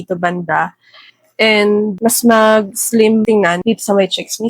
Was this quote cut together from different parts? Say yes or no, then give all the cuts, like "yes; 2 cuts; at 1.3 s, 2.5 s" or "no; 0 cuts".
yes; 2 cuts; at 2.0 s, 3.4 s